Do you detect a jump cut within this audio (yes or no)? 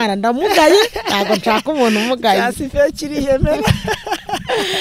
no